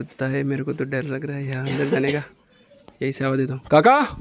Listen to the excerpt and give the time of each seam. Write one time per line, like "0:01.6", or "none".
none